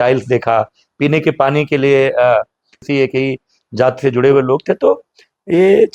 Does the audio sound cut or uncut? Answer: cut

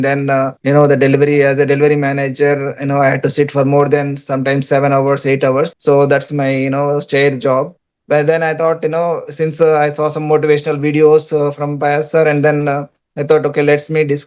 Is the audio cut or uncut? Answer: uncut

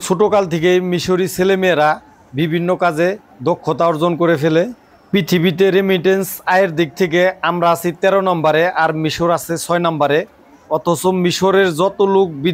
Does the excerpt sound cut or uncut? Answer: uncut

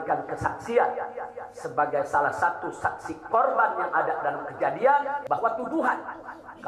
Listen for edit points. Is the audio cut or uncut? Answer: cut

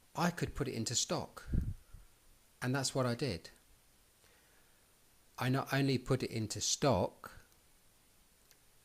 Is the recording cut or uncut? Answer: cut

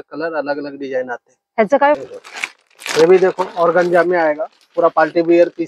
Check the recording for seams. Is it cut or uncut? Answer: cut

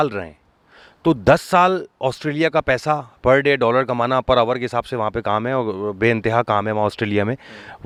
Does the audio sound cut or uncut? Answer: uncut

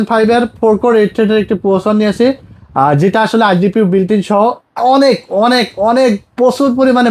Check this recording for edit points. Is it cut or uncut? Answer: uncut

